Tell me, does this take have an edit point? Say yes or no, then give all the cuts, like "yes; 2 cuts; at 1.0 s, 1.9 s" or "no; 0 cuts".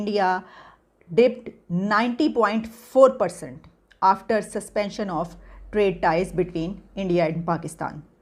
no; 0 cuts